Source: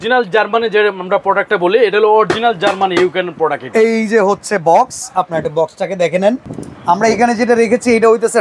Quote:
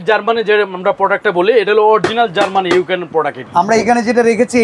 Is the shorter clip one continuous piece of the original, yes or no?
no